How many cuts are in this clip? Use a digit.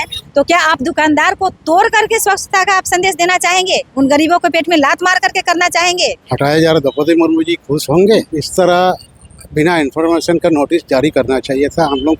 2